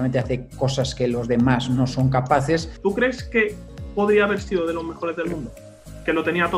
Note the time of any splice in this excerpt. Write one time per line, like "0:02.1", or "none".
none